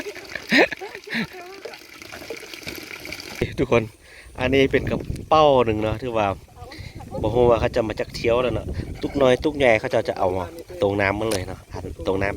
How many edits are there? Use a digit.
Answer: 1